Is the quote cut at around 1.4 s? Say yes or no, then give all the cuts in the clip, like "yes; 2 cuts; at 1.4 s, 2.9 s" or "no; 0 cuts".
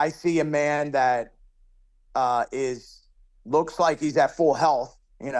no; 0 cuts